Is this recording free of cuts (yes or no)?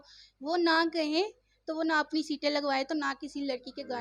yes